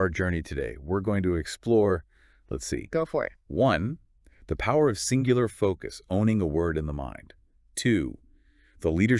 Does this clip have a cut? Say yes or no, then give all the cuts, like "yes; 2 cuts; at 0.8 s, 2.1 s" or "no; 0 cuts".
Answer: yes; 1 cut; at 3.4 s